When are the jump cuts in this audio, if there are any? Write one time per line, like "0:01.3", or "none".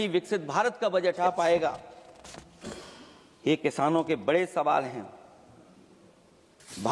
0:01.2